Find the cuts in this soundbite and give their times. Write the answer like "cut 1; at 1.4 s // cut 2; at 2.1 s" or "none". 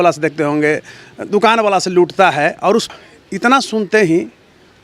cut 1; at 2.9 s

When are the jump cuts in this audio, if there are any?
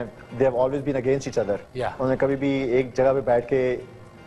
none

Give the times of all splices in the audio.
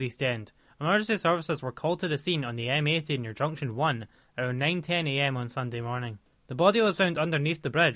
none

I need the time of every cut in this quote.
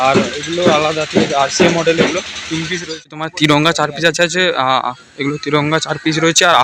cut 1; at 3.2 s

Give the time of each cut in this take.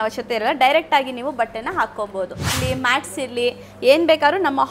cut 1; at 2.5 s

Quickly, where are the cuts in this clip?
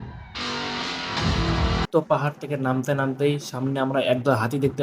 cut 1; at 1.9 s

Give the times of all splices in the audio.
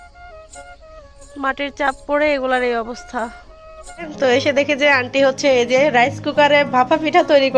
cut 1; at 4.1 s

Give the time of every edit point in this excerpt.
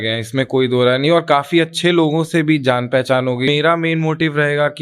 cut 1; at 3.5 s

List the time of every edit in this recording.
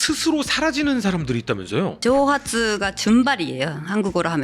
cut 1; at 2.0 s

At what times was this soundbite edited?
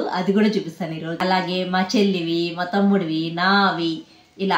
cut 1; at 1.1 s

